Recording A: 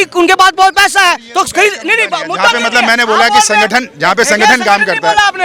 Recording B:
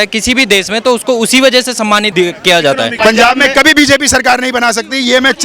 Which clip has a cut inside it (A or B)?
B